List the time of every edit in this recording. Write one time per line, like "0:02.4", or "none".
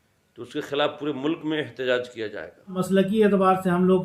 0:02.8